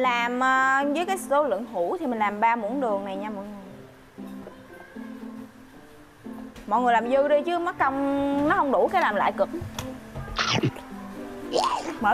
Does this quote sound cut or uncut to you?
uncut